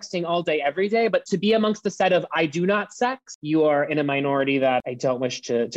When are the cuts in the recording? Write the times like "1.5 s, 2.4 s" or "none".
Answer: 1.2 s, 3.3 s, 4.8 s